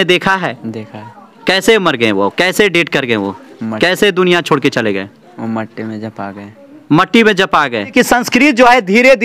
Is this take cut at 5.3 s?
no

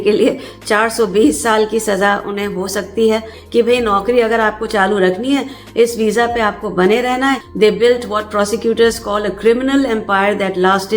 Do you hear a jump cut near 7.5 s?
yes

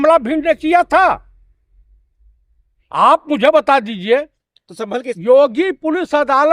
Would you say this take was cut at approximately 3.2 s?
no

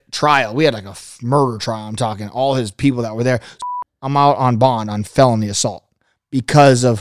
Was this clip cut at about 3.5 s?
yes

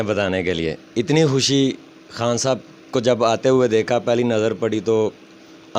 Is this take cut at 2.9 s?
no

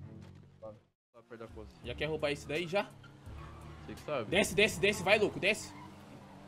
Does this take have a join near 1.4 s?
yes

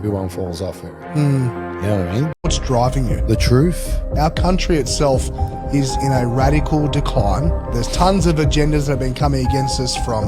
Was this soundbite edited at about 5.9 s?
no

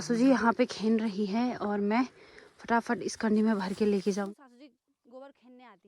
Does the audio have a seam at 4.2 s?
yes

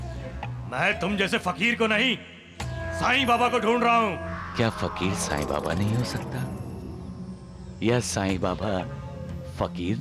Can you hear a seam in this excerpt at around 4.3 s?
yes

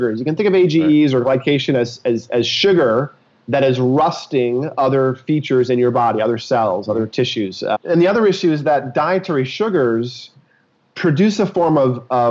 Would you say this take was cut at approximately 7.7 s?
yes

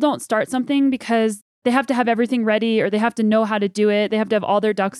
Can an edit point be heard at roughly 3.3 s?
no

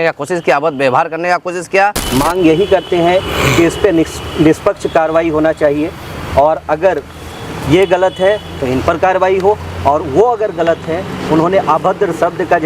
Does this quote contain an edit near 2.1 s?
yes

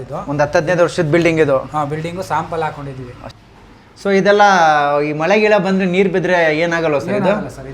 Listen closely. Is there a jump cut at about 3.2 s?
yes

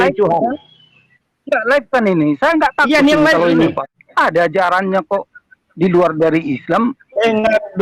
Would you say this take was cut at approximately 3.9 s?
yes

